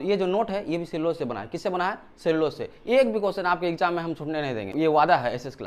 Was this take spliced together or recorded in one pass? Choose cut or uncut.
cut